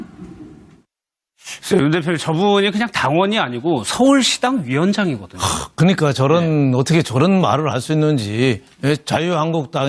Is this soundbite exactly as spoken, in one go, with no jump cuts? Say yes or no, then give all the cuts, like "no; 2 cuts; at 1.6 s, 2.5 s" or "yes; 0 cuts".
no; 1 cut; at 5.0 s